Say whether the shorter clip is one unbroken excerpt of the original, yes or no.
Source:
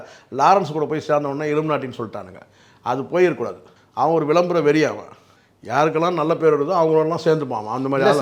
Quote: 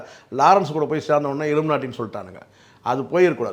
yes